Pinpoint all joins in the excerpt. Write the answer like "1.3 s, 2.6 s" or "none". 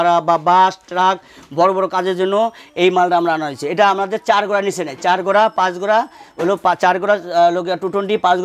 none